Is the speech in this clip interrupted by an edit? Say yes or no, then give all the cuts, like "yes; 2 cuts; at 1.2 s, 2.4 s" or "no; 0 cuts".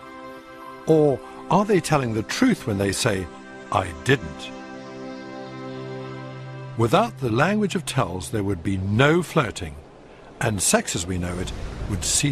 yes; 1 cut; at 1.3 s